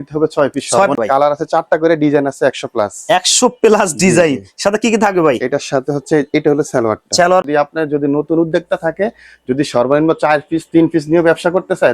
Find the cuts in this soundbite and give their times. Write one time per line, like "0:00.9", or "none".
0:00.9
0:07.4